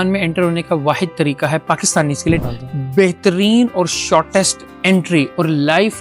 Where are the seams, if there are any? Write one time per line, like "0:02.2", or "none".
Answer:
0:02.4